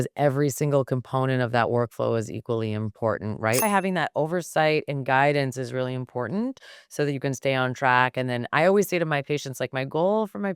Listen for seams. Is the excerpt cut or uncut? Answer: cut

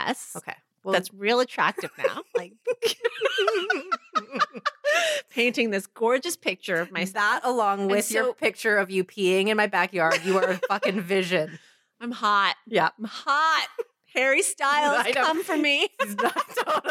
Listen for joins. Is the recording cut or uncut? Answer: uncut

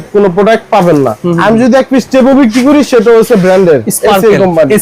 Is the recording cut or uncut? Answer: cut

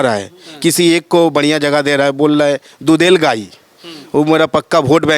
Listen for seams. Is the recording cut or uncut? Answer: uncut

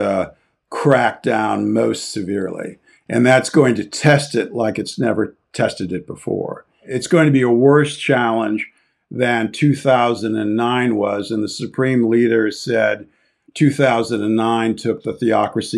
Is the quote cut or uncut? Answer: cut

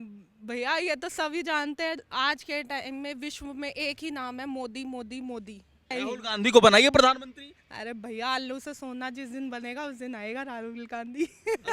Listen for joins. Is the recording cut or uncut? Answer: cut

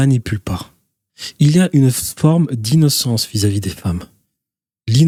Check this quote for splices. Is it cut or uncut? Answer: uncut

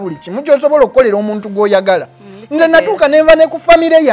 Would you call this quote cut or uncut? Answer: uncut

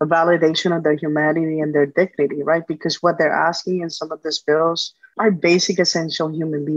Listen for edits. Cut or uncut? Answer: uncut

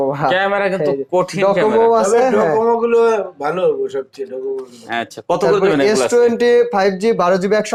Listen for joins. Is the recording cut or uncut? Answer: uncut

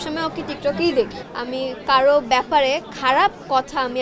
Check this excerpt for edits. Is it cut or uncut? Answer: cut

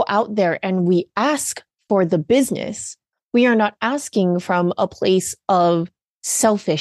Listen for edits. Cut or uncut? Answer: uncut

